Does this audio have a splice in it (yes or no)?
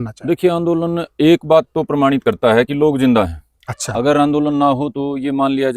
no